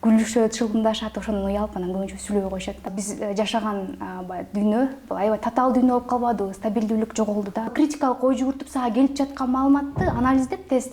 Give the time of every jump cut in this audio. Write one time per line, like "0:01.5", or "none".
0:02.9
0:07.7